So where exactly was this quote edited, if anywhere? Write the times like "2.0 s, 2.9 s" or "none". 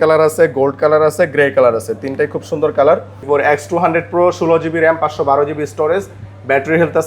3.2 s